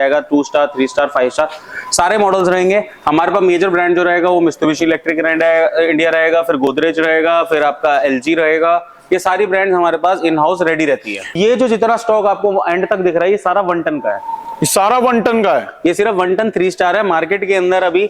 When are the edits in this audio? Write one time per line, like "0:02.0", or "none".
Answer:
0:11.4